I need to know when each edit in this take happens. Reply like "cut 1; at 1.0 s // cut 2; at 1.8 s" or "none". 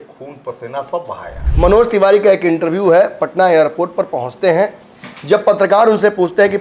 cut 1; at 1.4 s